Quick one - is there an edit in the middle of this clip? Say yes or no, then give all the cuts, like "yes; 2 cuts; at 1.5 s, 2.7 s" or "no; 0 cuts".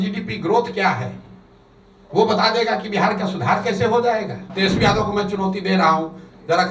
yes; 1 cut; at 4.5 s